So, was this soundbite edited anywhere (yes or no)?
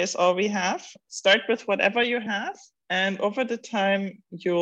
yes